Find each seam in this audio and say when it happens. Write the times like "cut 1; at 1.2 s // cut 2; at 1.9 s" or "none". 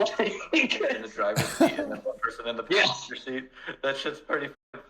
cut 1; at 1.0 s